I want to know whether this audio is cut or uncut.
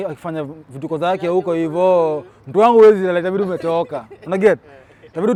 uncut